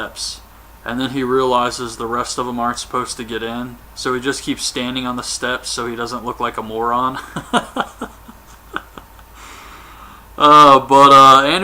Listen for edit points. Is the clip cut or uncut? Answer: cut